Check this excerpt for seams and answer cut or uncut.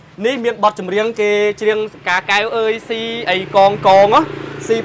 uncut